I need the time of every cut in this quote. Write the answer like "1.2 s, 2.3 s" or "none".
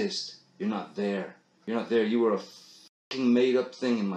none